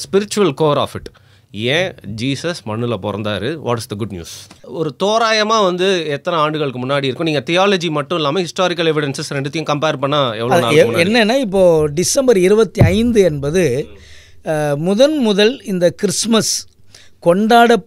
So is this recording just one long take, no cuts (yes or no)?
no